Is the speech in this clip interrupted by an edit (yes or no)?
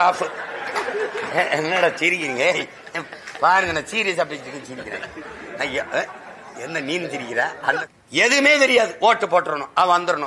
yes